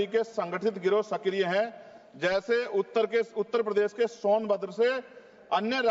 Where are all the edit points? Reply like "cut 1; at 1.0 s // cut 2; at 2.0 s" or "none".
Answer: none